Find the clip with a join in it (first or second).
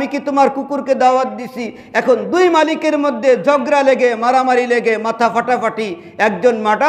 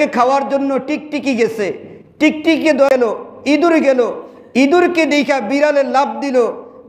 second